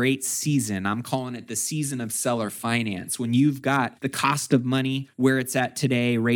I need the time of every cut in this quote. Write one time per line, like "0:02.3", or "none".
0:04.0
0:05.1